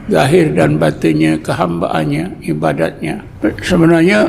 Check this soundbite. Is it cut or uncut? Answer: cut